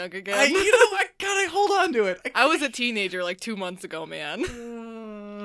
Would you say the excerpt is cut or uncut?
uncut